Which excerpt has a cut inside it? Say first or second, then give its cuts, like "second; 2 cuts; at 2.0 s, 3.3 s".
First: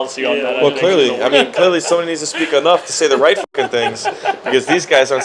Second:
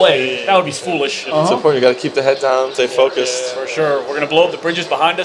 second; 2 cuts; at 1.2 s, 2.7 s